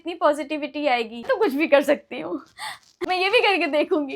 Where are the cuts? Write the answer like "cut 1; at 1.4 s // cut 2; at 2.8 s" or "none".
cut 1; at 1.3 s // cut 2; at 2.9 s